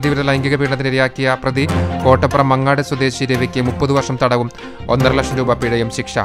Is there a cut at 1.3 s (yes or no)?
no